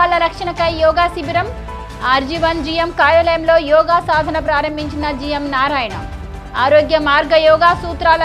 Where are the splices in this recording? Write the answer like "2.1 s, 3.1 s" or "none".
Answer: none